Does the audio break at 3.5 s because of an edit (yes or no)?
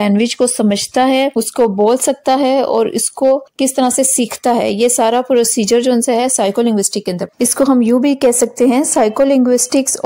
yes